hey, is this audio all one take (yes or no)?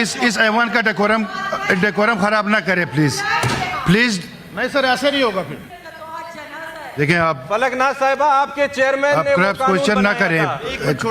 no